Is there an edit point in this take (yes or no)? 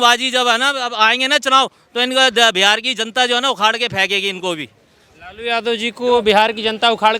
no